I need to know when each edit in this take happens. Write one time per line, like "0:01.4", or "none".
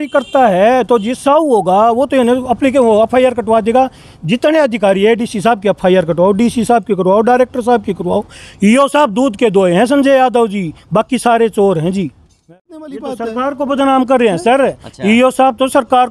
0:12.5